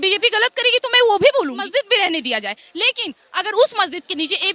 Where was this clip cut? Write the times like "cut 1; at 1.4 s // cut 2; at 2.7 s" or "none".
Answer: cut 1; at 1.7 s